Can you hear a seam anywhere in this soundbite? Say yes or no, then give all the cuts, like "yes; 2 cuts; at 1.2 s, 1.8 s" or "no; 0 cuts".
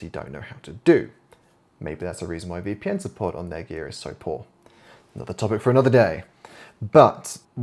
no; 0 cuts